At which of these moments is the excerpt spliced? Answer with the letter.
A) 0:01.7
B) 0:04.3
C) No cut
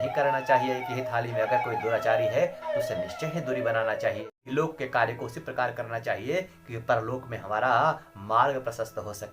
B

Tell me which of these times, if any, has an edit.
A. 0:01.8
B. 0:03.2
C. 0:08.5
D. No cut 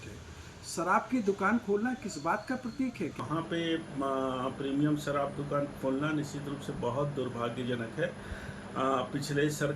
B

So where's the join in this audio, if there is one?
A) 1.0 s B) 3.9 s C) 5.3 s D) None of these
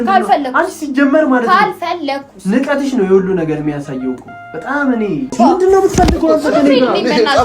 C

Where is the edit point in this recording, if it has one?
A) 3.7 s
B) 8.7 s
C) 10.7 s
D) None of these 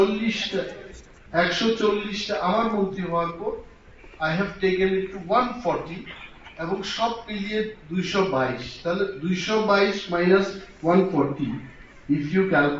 D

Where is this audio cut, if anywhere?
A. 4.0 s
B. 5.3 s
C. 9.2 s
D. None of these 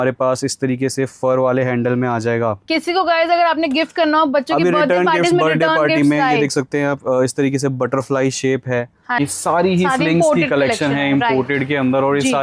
C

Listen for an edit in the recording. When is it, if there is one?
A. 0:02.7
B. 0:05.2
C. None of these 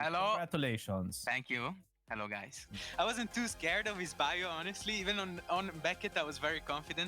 A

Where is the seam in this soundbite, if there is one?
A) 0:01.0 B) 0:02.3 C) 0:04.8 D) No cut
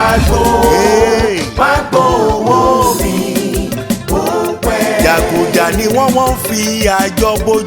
D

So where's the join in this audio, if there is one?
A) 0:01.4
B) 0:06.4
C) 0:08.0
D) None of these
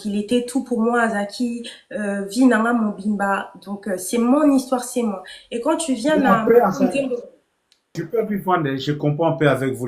C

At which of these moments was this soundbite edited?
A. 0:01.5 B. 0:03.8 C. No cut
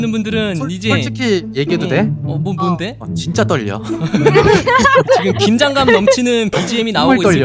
C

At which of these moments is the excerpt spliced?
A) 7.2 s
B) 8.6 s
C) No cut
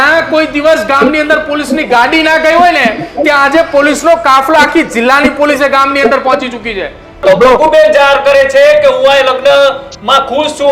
A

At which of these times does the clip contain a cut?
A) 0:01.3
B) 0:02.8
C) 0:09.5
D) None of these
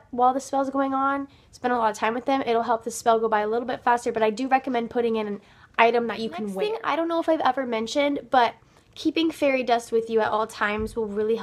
B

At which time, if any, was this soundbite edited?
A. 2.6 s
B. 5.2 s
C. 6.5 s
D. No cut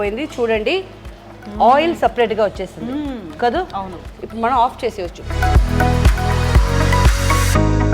B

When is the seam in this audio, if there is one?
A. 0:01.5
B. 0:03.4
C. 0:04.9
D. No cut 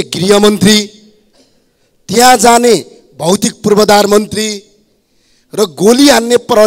D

